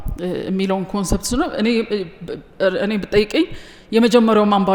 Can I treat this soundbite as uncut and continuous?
yes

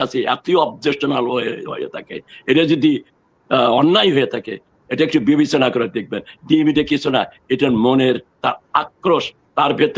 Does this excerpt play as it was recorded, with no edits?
yes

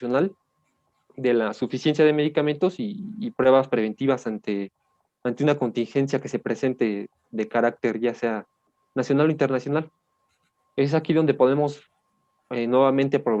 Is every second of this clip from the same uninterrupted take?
yes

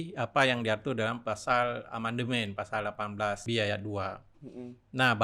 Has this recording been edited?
yes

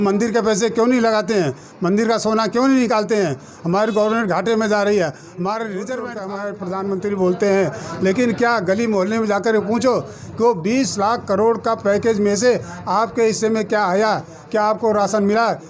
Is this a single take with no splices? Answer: no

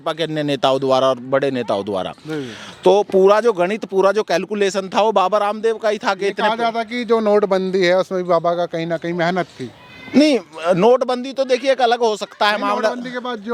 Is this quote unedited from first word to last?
yes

